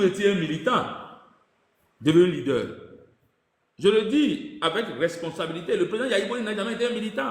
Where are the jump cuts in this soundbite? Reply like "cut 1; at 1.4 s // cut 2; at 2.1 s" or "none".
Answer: none